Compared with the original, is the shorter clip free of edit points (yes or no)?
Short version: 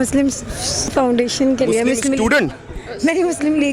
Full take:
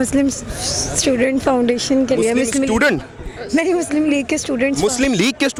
no